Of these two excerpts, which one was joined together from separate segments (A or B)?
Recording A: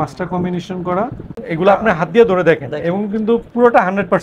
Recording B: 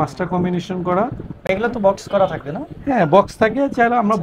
A